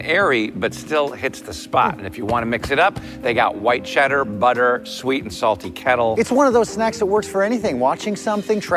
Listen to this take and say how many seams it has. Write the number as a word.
one